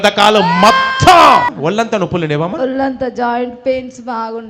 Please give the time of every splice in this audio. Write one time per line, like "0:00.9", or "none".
0:01.5